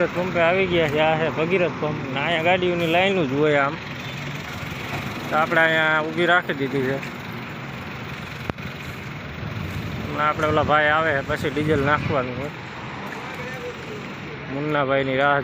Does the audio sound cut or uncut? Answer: uncut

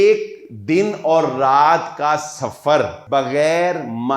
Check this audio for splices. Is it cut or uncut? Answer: cut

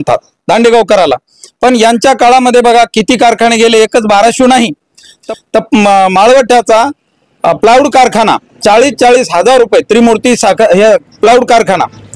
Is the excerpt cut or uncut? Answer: uncut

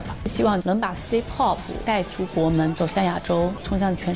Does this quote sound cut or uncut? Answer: uncut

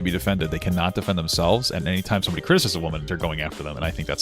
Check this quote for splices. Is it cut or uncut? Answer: cut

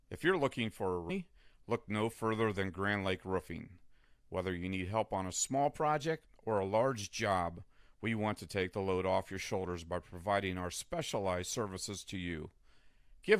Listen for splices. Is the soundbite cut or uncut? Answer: cut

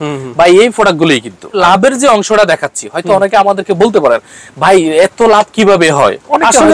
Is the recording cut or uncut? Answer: cut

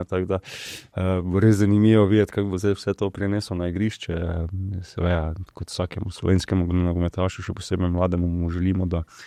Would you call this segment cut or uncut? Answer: uncut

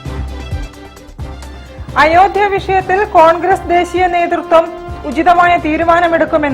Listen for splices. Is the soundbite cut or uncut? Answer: uncut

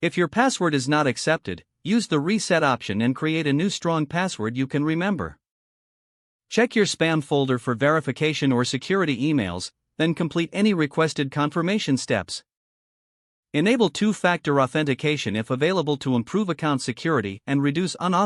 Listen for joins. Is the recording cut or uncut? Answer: uncut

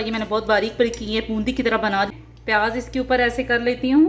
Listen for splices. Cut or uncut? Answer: cut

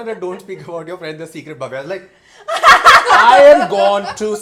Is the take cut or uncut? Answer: uncut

